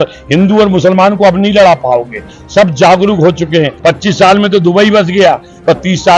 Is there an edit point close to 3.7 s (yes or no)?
yes